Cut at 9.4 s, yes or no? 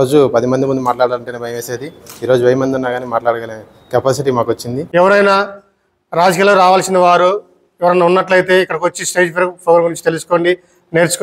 no